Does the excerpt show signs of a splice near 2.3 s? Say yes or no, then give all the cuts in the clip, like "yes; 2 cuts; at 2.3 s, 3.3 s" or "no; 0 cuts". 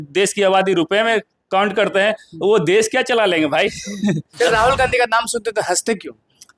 no; 1 cut; at 4.3 s